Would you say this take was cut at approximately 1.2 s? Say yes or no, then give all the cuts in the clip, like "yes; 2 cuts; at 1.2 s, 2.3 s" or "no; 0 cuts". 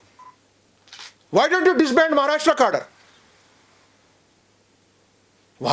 yes; 1 cut; at 1.2 s